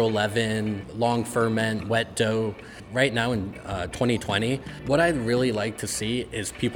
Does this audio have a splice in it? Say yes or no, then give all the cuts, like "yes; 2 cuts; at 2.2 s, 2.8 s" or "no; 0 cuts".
yes; 3 cuts; at 0.9 s, 2.7 s, 4.7 s